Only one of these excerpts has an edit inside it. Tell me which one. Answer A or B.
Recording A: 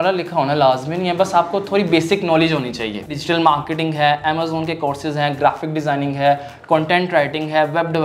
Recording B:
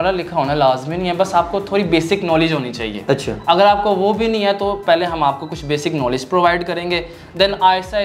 A